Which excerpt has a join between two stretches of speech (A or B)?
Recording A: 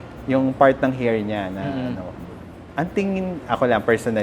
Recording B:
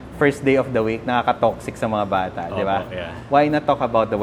A